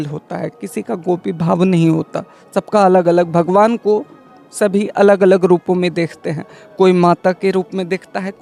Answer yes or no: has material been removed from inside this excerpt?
no